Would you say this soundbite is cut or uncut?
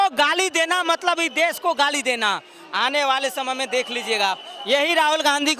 uncut